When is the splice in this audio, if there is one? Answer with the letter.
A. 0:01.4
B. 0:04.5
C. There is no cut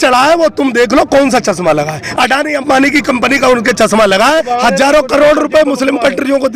B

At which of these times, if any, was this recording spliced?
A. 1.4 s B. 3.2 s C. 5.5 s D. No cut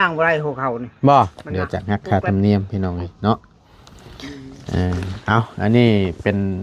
A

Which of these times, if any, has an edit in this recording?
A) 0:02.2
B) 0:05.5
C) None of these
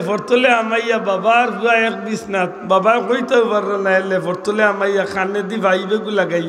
C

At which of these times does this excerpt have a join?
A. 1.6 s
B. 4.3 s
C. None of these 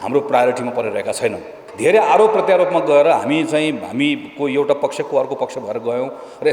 A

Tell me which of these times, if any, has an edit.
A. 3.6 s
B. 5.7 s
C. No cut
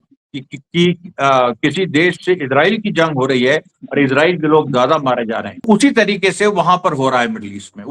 B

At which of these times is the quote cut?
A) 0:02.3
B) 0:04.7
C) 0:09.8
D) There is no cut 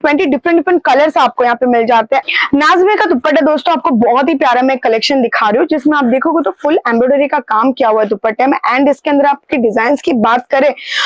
A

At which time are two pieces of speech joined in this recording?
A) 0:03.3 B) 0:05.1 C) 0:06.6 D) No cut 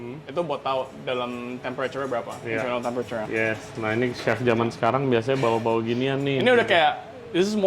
A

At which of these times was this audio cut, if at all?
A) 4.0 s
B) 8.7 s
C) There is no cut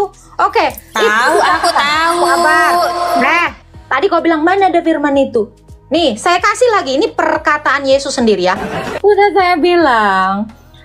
B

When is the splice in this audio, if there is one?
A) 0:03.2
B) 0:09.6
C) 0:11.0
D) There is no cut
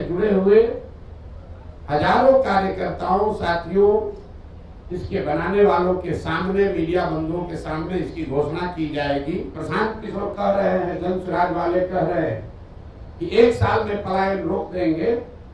B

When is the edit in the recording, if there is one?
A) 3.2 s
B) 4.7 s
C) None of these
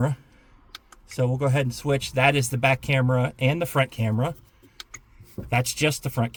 C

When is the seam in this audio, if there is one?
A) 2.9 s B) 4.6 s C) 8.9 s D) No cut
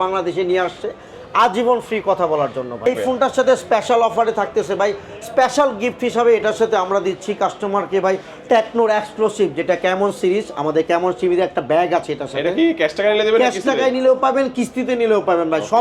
A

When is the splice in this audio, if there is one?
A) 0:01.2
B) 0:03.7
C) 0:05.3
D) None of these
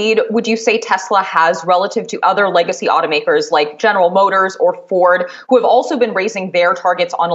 D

